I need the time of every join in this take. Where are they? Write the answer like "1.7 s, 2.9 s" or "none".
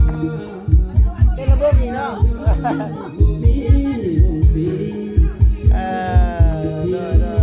1.4 s

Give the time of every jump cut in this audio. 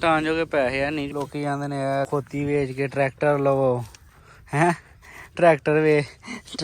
1.1 s, 2.1 s

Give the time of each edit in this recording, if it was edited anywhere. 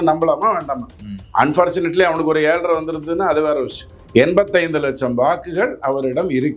3.8 s

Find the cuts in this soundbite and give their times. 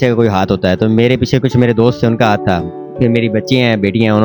none

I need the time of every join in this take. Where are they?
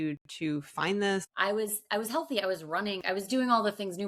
1.3 s, 3.0 s

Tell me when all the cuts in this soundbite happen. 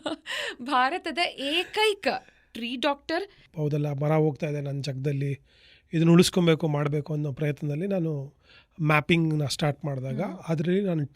3.5 s

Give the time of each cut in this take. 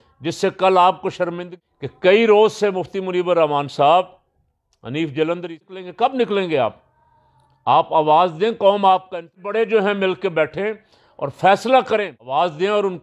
1.5 s, 5.6 s, 9.4 s, 12.2 s

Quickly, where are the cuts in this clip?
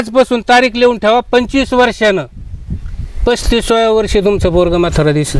none

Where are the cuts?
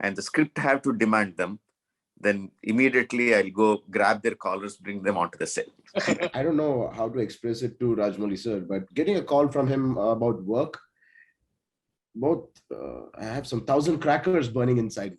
6.3 s

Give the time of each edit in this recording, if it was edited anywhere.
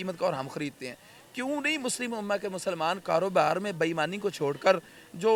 none

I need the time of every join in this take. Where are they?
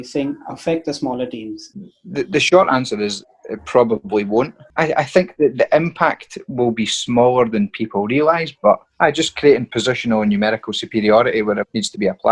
1.7 s, 4.7 s, 8.8 s

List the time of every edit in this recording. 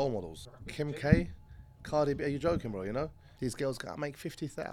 1.0 s, 3.2 s

